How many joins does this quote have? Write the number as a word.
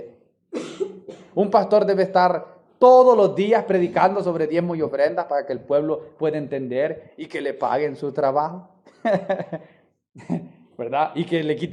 zero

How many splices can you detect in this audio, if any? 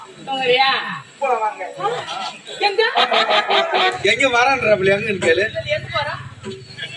one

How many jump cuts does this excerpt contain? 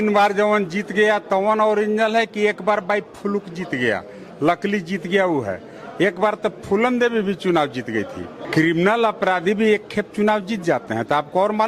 one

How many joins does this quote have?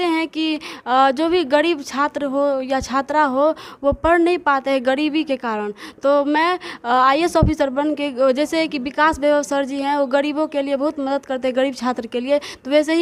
zero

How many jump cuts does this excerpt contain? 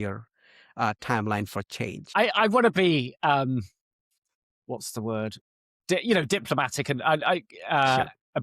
one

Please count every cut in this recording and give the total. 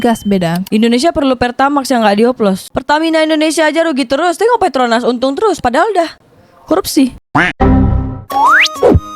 two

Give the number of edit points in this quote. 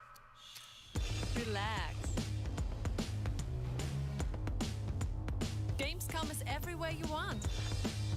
zero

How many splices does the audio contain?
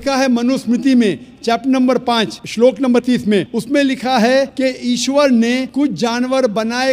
four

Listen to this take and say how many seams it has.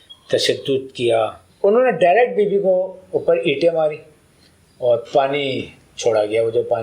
one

